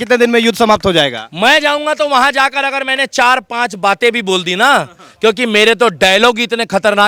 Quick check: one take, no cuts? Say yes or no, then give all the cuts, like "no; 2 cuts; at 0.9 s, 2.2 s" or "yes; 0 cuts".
yes; 0 cuts